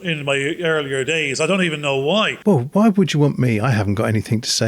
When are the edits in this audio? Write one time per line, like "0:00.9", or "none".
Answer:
0:02.3